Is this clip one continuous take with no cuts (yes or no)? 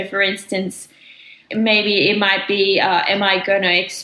no